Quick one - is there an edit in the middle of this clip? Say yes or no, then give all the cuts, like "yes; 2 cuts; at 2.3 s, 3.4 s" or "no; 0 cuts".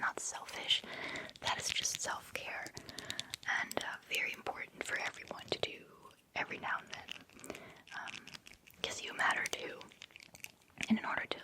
no; 0 cuts